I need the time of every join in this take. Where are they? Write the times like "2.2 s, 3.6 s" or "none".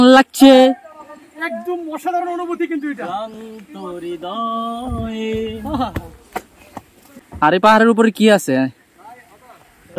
none